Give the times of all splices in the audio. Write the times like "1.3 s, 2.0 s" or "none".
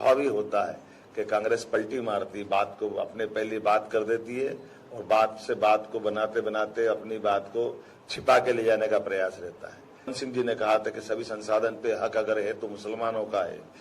10.2 s